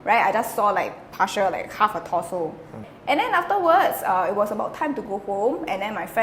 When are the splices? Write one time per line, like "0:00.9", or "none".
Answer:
0:02.8